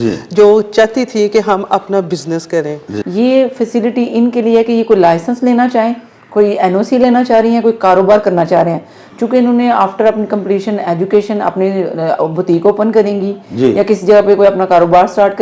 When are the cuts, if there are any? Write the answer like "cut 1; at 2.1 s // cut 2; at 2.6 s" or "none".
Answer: cut 1; at 2.9 s